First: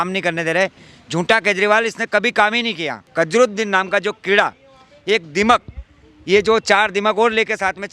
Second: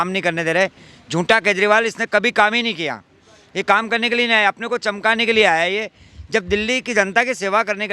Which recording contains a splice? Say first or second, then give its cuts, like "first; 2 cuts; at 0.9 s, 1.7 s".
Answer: first; 1 cut; at 3.0 s